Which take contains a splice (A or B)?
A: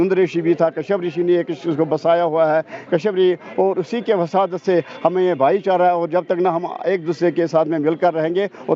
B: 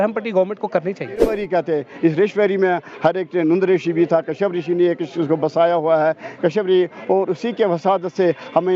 B